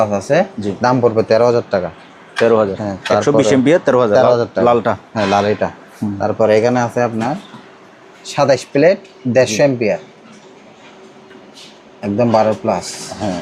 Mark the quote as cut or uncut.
uncut